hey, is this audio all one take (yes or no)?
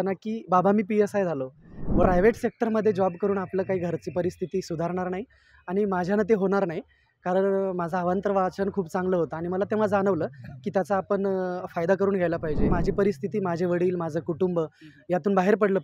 no